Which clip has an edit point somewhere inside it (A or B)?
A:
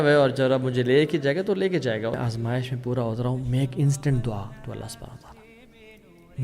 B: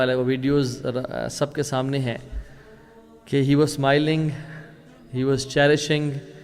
A